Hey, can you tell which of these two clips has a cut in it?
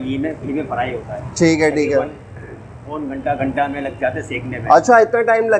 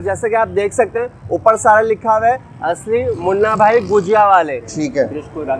second; 1 cut; at 4.6 s

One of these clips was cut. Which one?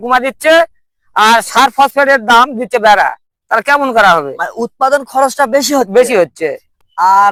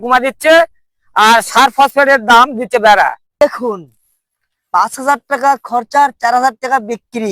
second; 1 cut; at 3.4 s

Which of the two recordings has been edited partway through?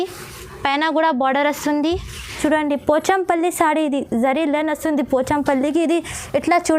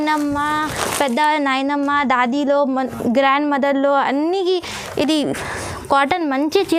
first; 1 cut; at 2.4 s

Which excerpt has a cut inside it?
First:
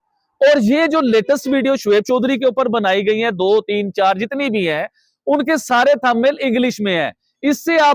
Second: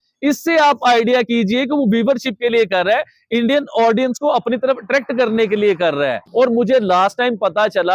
second; 1 cut; at 6.2 s

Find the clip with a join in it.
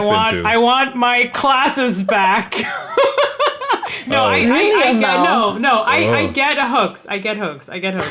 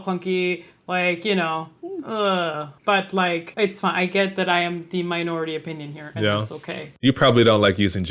second; 3 cuts; at 2.7 s, 3.5 s, 6.9 s

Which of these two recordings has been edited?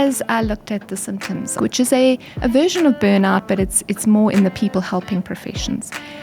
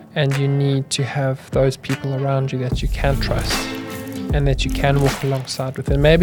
first; 1 cut; at 1.6 s

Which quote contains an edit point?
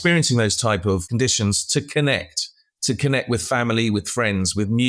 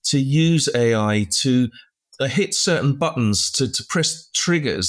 first; 1 cut; at 1.1 s

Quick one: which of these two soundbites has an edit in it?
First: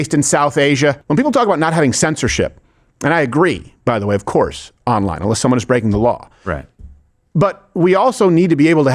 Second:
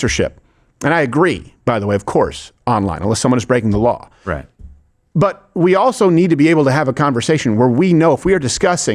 first; 1 cut; at 1.0 s

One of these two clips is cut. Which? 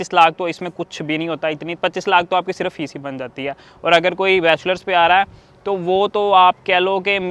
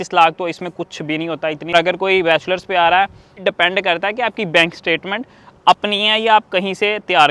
second; 2 cuts; at 1.7 s, 3.4 s

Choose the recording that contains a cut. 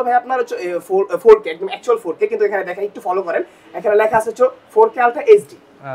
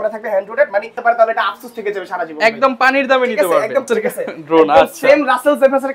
second; 2 cuts; at 1.0 s, 3.9 s

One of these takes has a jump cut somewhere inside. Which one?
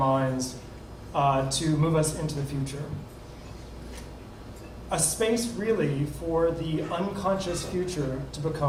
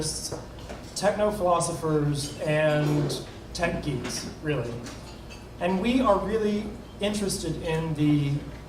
second; 1 cut; at 6.8 s

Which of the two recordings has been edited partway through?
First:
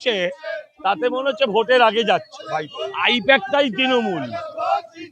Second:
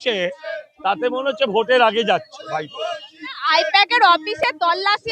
first; 1 cut; at 2.8 s

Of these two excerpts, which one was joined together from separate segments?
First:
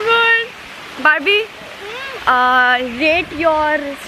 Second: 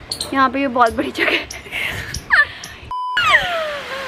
second; 1 cut; at 3.1 s

